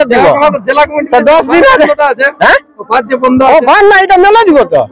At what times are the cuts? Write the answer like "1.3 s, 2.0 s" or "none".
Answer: none